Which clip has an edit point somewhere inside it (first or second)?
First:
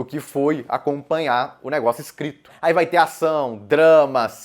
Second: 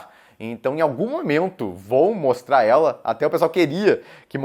first